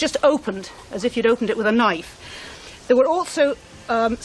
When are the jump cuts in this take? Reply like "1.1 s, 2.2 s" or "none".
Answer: none